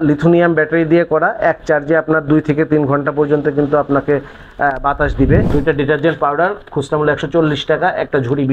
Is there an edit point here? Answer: yes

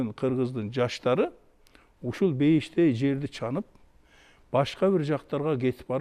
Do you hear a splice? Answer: no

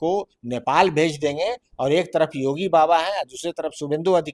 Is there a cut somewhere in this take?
no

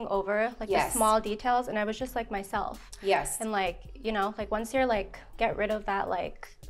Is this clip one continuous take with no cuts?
yes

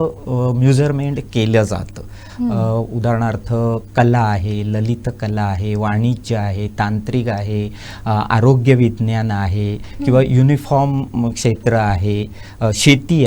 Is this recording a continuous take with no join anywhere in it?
yes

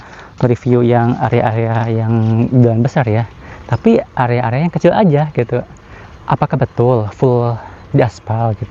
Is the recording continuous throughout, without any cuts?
yes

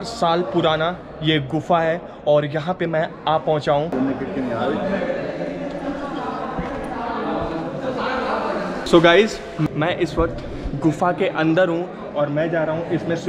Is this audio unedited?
yes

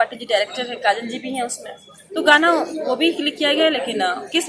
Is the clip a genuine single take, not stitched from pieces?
yes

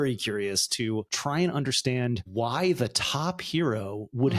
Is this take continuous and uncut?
yes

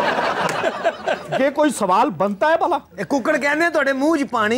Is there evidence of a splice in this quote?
no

